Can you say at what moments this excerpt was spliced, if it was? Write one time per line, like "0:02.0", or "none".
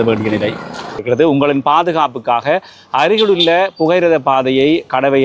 0:01.0